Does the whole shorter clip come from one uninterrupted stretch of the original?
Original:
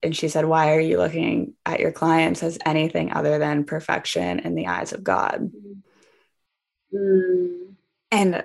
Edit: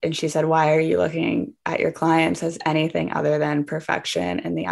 yes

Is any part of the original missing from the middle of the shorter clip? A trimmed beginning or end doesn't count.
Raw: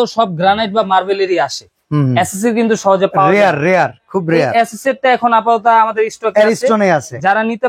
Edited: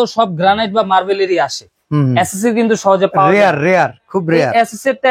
no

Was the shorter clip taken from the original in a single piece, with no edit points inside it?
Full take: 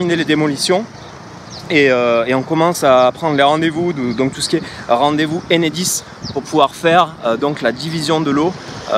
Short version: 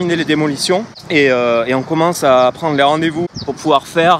no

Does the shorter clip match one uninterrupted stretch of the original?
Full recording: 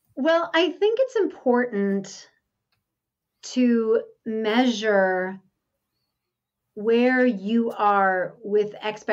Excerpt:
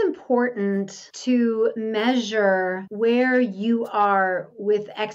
no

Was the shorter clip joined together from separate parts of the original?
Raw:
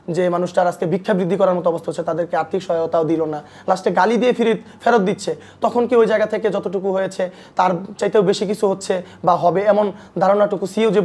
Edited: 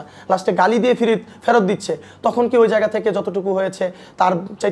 no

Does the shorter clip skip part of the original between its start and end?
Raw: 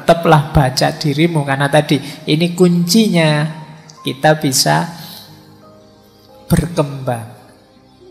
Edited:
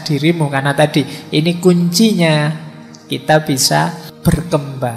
yes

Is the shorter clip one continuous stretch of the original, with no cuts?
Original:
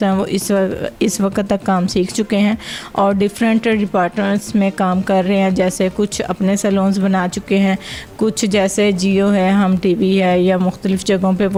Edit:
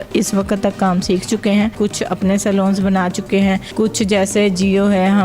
no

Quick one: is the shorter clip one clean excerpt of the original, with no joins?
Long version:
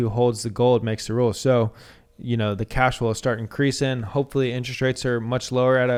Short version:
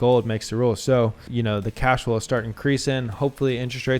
no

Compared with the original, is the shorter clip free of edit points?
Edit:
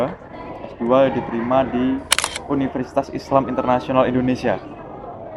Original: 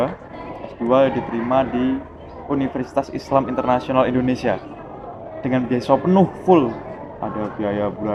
yes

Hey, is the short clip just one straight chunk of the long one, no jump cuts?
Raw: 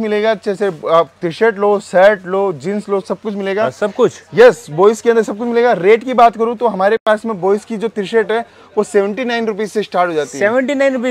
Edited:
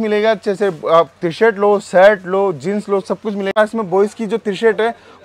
no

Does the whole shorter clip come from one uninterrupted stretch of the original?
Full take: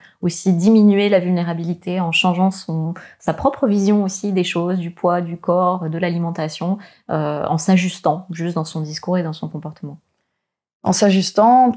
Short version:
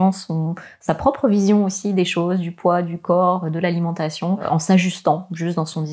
no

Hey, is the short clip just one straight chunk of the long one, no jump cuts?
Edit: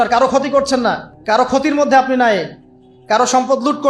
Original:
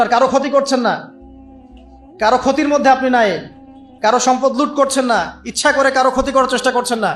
no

